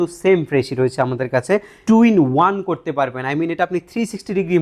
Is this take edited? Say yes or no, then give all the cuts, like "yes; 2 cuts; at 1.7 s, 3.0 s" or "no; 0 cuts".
yes; 1 cut; at 1.7 s